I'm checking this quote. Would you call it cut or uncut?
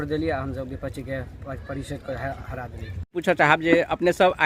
cut